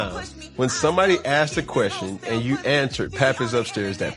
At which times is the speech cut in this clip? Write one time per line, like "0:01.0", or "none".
none